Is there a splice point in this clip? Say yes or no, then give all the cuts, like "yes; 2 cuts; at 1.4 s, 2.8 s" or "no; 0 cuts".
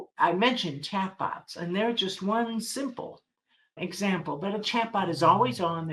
yes; 1 cut; at 3.8 s